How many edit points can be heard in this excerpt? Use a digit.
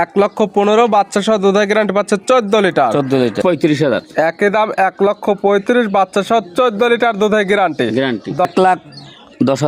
2